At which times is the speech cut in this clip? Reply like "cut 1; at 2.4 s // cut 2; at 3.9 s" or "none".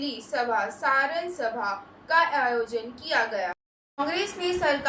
cut 1; at 3.6 s